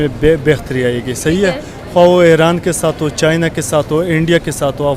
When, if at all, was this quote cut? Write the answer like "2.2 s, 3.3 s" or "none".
none

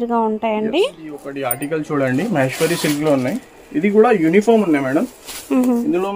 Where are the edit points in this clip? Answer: 1.5 s

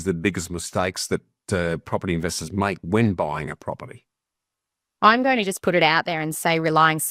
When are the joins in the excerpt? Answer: none

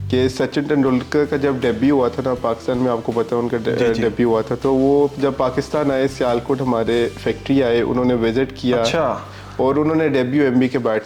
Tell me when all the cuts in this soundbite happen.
none

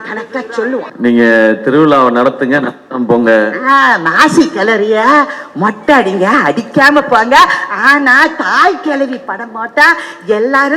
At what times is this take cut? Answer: 0.9 s

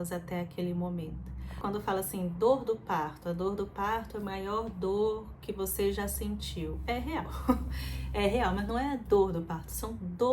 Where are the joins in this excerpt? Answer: 1.6 s

